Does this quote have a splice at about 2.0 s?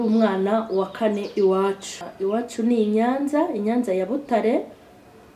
yes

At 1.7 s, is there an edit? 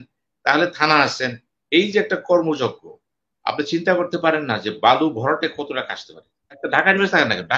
no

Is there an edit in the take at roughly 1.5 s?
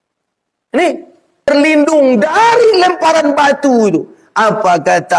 yes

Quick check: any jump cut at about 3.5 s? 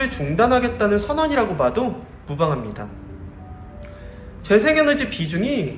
no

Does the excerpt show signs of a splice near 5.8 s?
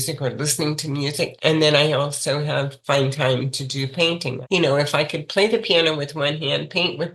no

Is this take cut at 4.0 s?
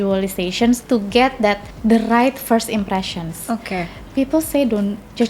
no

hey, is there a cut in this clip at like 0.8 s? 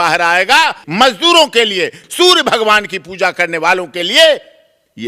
yes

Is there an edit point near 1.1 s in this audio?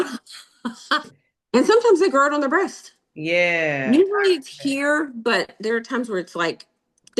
yes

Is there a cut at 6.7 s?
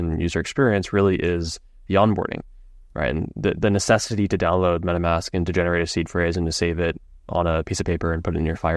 no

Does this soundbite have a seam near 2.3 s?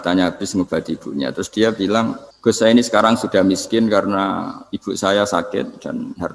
yes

